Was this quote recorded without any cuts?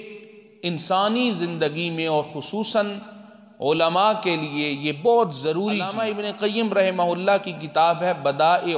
no; 1 cut; at 5.9 s

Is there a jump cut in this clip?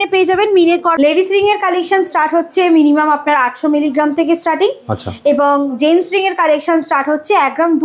yes; 1 cut; at 0.9 s

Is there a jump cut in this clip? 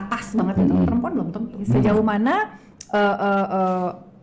yes; 1 cut; at 1.6 s

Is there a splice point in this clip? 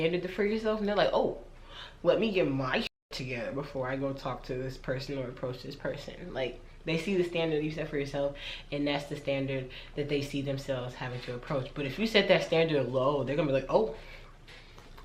no; 0 cuts

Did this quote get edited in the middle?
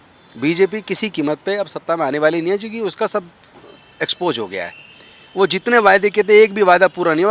no; 0 cuts

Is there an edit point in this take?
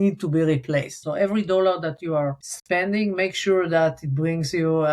yes; 2 cuts; at 1.0 s, 2.5 s

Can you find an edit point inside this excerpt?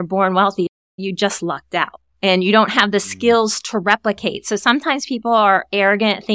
yes; 1 cut; at 0.9 s

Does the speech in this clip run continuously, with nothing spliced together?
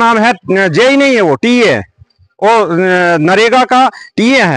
yes; 0 cuts

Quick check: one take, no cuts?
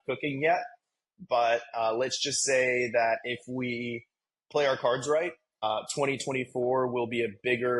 no; 1 cut; at 5.6 s

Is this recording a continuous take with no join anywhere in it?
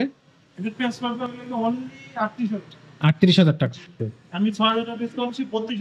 no; 1 cut; at 4.0 s

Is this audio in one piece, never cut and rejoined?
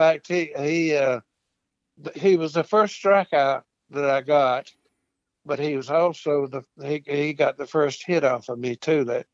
yes; 0 cuts

